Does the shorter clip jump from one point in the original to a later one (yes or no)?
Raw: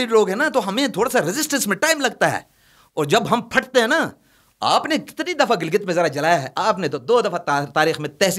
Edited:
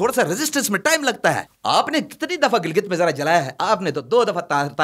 yes